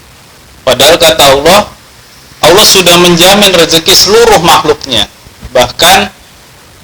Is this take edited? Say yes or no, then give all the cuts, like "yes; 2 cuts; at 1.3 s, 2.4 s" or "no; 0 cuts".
no; 0 cuts